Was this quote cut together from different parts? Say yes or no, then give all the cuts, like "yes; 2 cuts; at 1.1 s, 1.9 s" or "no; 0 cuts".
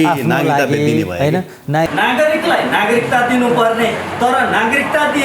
yes; 1 cut; at 1.9 s